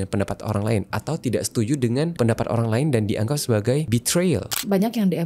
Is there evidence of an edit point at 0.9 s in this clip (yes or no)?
no